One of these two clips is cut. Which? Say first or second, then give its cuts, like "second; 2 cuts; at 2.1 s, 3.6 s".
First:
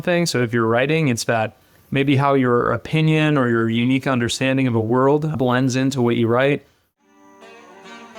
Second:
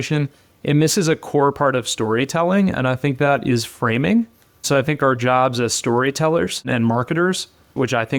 first; 1 cut; at 6.8 s